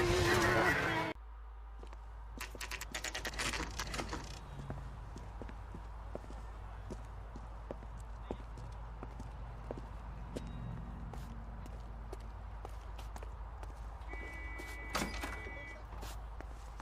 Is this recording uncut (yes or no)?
no